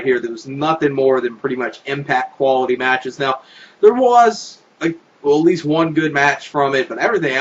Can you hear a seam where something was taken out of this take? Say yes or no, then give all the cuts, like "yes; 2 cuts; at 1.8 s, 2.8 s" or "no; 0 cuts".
no; 0 cuts